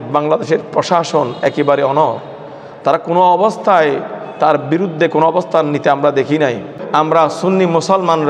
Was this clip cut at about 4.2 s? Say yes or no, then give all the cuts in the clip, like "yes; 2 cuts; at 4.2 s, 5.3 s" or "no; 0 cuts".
no; 1 cut; at 6.8 s